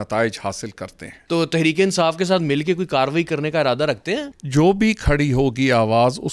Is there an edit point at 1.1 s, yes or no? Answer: yes